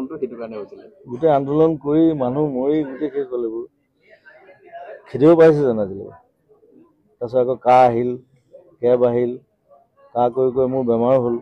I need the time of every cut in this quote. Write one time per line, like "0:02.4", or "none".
none